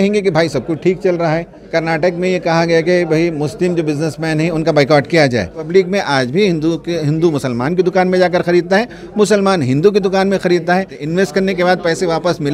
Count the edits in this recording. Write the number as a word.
three